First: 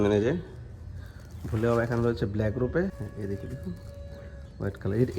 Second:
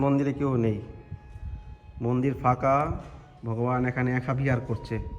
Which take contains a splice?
first; 1 cut; at 3.1 s

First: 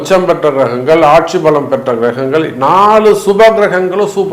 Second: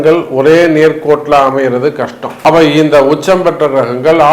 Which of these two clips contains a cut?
second; 1 cut; at 2.3 s

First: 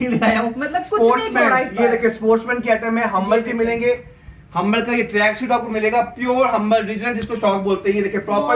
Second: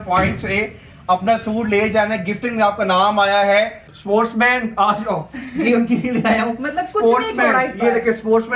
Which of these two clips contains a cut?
second; 1 cut; at 3.9 s

